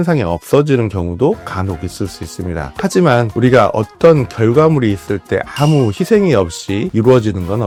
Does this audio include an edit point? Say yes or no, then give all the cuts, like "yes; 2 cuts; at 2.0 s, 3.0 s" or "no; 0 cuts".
no; 0 cuts